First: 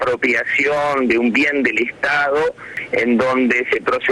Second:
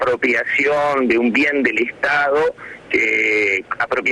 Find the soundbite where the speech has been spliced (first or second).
first